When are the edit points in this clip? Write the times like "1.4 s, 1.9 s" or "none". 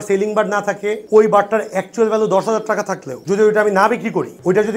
none

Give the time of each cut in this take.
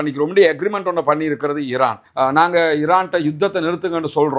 2.1 s

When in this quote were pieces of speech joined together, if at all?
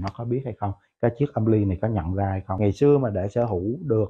2.6 s

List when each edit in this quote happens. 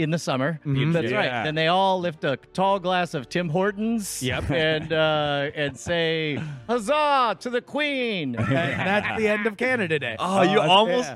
0.9 s, 8.4 s

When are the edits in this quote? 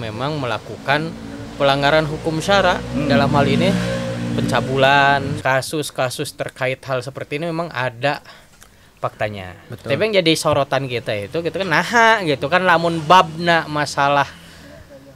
5.4 s, 9.7 s

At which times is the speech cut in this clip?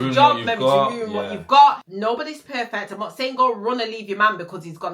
1.9 s

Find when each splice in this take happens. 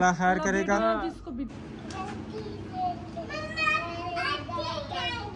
1.5 s

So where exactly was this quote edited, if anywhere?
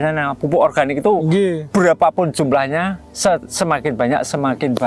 1.6 s

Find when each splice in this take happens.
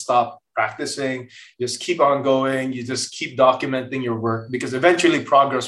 none

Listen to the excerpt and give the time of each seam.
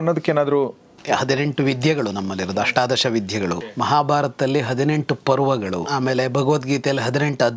0.9 s, 3.7 s, 5.9 s

